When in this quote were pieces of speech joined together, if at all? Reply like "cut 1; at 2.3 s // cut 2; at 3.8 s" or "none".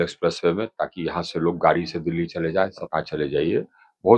cut 1; at 2.8 s